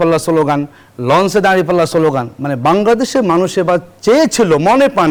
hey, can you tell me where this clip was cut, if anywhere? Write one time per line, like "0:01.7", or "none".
none

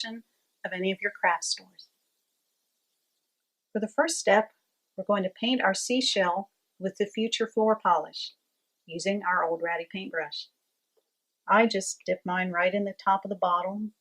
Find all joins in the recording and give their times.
0:10.8

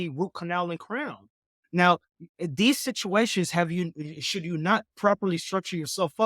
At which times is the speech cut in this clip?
0:01.5

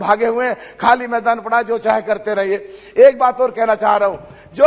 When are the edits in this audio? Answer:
none

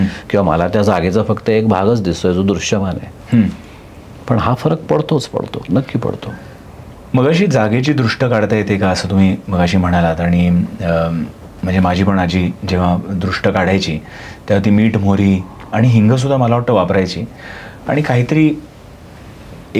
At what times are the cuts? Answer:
none

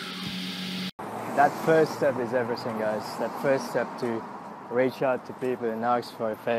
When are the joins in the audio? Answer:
0:00.9

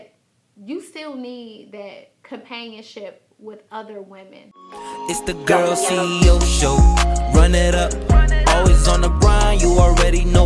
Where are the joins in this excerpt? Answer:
0:04.4

